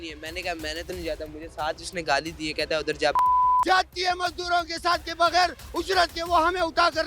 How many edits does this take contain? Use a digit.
1